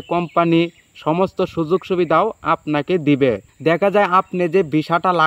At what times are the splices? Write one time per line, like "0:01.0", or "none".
0:03.5